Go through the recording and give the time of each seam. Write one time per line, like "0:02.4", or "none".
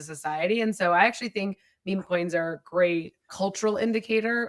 none